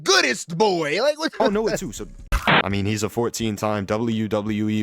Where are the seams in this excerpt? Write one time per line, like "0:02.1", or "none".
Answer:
0:02.3